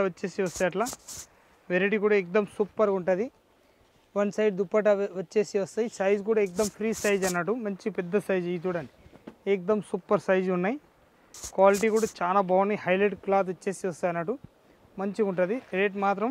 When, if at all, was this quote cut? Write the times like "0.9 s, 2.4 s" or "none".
none